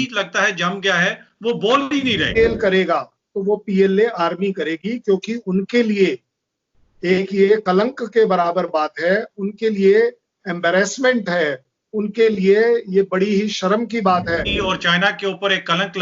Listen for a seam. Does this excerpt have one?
yes; 2 cuts; at 2.4 s, 14.5 s

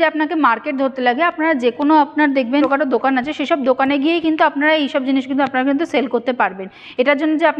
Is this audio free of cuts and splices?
no; 1 cut; at 2.7 s

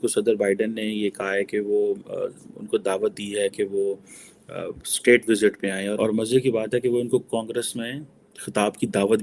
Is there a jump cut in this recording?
yes; 1 cut; at 5.9 s

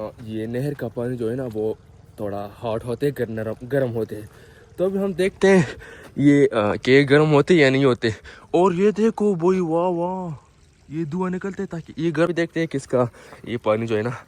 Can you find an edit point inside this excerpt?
yes; 1 cut; at 12.3 s

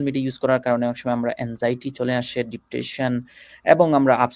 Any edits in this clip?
no; 0 cuts

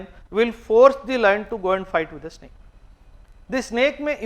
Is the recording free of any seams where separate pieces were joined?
yes; 0 cuts

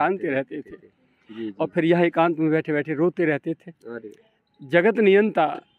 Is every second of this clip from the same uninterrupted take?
no; 1 cut; at 4.4 s

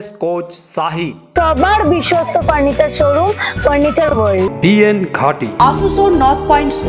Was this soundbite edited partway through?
no; 0 cuts

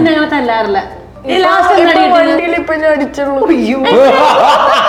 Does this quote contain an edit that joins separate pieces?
no; 0 cuts

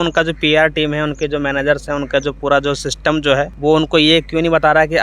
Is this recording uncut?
yes; 0 cuts

